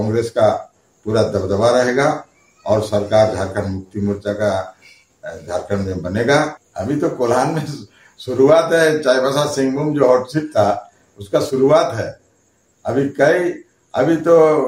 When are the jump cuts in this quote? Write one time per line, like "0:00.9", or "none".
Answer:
0:06.6